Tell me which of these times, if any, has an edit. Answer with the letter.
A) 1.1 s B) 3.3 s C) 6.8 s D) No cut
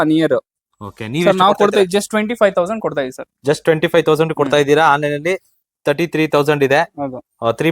D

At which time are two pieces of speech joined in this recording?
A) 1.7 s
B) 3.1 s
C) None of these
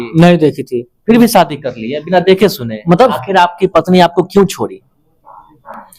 B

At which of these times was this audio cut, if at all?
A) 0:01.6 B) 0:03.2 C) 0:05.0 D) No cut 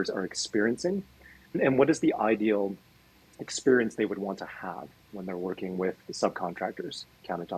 A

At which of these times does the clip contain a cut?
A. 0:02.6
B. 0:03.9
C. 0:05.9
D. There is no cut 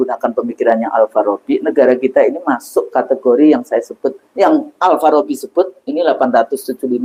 D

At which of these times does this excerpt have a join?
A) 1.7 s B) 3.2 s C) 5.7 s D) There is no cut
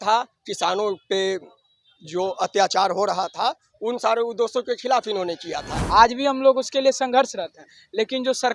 C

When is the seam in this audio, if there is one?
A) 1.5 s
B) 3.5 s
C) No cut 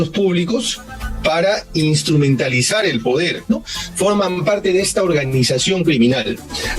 B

